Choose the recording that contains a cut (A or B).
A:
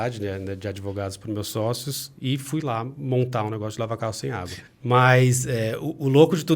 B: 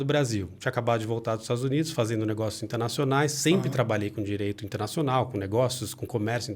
A